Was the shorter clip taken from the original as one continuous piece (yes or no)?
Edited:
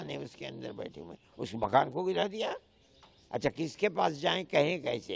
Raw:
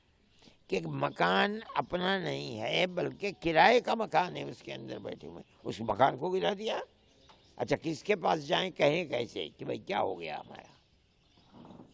yes